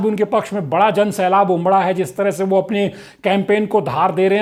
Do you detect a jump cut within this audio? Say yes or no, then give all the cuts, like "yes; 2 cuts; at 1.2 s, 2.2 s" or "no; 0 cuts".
no; 0 cuts